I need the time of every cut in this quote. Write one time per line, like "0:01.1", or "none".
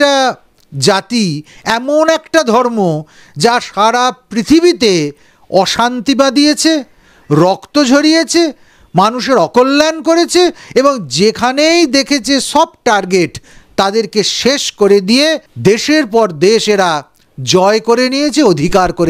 none